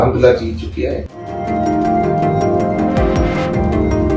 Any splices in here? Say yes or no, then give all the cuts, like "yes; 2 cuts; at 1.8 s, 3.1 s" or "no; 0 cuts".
yes; 1 cut; at 1.2 s